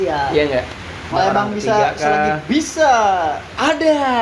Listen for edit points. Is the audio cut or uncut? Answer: cut